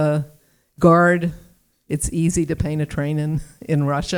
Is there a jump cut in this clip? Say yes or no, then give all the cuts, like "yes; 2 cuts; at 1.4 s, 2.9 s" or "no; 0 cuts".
no; 0 cuts